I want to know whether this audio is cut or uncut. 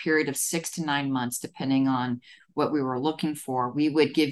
uncut